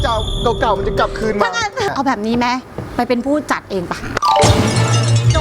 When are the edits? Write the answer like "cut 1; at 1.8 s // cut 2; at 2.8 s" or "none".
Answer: cut 1; at 1.9 s